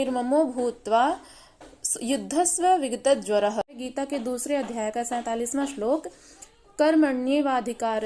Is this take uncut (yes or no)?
no